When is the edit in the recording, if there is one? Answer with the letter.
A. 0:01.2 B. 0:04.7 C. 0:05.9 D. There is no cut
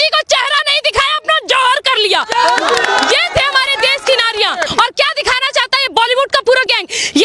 B